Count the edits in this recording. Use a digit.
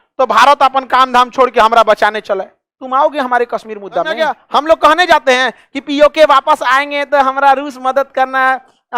1